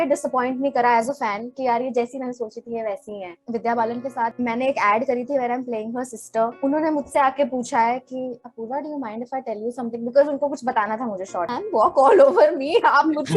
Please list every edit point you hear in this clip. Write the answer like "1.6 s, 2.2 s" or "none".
3.3 s, 4.3 s, 6.5 s, 11.5 s